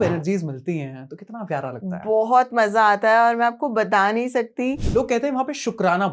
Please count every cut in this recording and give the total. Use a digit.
1